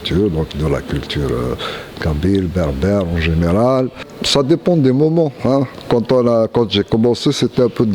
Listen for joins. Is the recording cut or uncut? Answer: cut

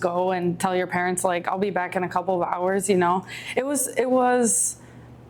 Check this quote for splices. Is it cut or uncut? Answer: uncut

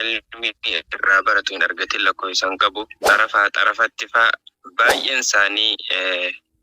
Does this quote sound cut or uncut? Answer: cut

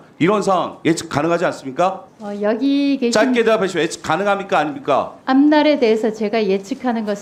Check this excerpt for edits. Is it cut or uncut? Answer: uncut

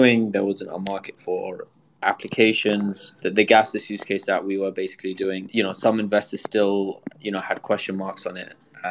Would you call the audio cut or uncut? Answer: cut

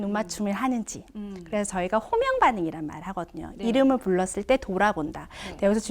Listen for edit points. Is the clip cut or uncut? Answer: uncut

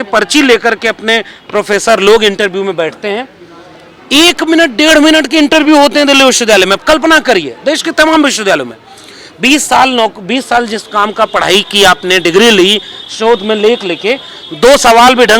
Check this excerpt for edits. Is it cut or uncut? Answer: uncut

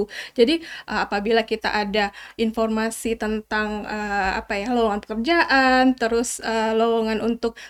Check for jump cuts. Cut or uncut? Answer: uncut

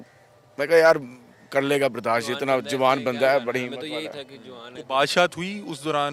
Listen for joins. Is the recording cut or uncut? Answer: uncut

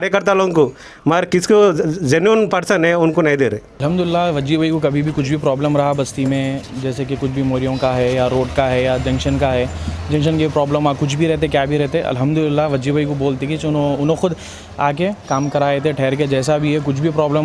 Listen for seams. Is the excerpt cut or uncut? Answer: cut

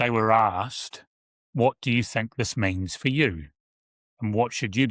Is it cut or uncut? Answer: uncut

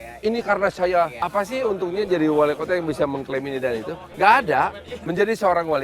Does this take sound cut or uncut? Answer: cut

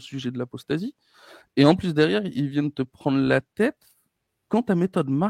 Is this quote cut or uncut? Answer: uncut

